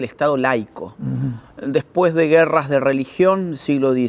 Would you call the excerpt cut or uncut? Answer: uncut